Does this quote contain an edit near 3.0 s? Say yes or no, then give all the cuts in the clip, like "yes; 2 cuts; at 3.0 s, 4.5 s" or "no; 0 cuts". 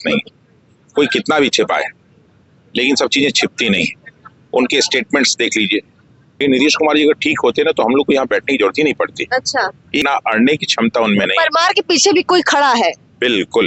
no; 2 cuts; at 6.3 s, 10.0 s